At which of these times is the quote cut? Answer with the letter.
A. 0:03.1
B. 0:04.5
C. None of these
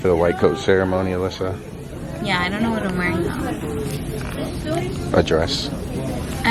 C